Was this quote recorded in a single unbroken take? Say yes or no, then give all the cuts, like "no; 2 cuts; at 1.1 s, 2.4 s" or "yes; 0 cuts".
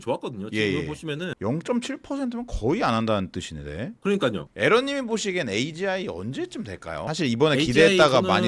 no; 1 cut; at 4.4 s